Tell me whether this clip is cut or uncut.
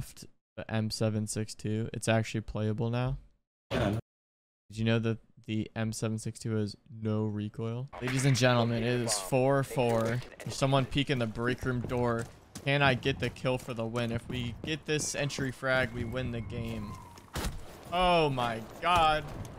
cut